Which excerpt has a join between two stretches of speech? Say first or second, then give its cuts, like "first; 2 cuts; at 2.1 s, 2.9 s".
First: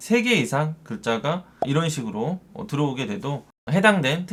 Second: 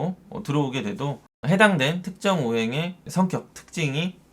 second; 1 cut; at 3.0 s